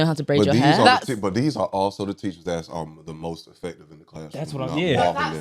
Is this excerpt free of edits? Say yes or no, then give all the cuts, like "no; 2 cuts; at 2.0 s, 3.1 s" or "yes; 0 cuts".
yes; 0 cuts